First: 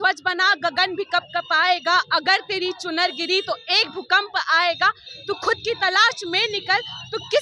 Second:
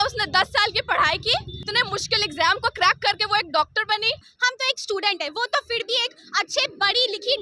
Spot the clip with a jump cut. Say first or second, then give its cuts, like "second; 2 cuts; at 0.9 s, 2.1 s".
second; 2 cuts; at 1.6 s, 4.4 s